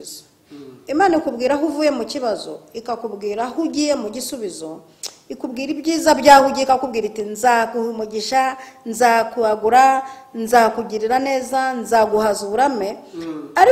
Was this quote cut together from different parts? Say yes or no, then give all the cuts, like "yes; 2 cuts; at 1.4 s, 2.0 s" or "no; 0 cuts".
no; 0 cuts